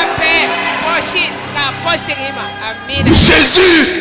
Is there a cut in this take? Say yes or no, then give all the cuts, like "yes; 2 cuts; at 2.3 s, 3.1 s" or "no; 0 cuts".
yes; 1 cut; at 3.1 s